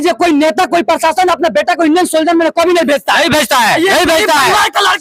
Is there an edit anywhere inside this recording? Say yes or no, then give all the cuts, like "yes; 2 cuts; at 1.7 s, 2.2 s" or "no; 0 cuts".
no; 0 cuts